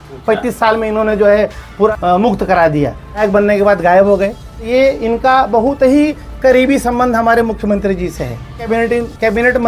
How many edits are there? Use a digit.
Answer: 4